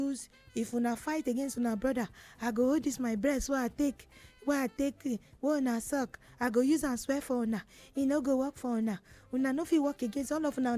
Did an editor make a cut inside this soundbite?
no; 0 cuts

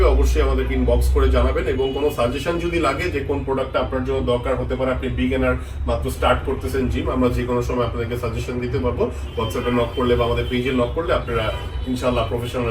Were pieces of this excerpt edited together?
no; 0 cuts

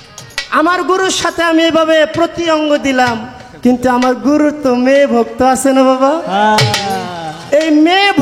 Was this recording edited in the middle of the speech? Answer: no; 0 cuts

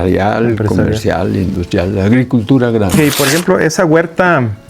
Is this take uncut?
no; 1 cut; at 2.9 s

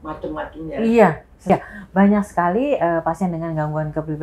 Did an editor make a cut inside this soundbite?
yes; 1 cut; at 1.5 s

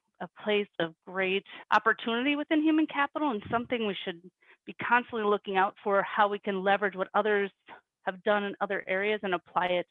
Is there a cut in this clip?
no; 0 cuts

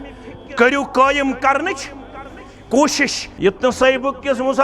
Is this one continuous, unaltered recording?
no; 1 cut; at 3.2 s

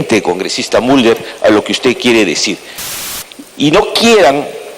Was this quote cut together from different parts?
yes; 1 cut; at 2.9 s

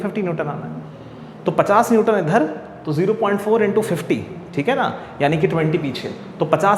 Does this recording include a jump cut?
no; 0 cuts

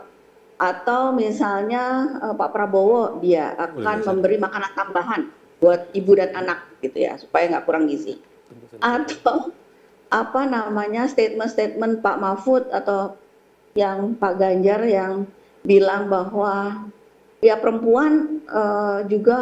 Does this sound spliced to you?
no; 0 cuts

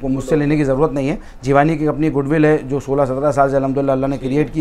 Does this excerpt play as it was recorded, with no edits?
yes; 0 cuts

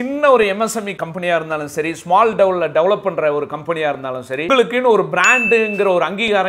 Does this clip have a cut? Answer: yes; 2 cuts; at 0.9 s, 4.5 s

